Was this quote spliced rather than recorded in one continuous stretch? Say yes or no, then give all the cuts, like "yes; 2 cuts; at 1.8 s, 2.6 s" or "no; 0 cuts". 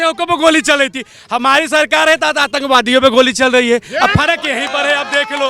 no; 0 cuts